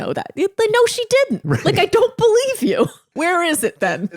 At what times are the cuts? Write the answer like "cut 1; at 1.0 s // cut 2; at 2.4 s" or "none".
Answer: cut 1; at 3.1 s